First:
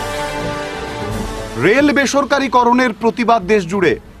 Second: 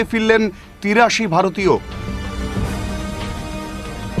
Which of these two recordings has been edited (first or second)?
first